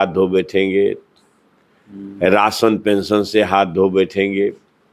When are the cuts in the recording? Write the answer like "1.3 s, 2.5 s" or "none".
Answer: none